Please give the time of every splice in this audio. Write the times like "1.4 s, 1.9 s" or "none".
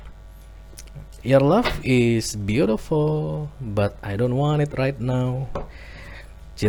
none